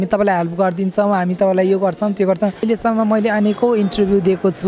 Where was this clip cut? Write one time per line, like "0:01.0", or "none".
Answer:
0:02.6